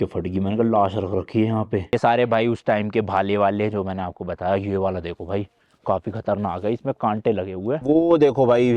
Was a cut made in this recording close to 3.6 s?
no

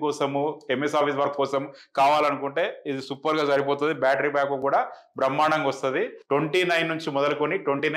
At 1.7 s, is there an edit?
no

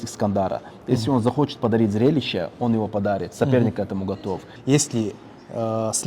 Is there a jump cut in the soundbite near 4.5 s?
yes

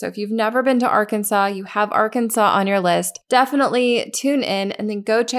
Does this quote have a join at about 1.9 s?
no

